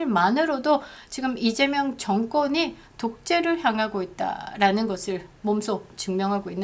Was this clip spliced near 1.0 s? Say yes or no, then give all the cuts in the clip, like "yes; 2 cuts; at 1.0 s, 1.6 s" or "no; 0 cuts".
no; 0 cuts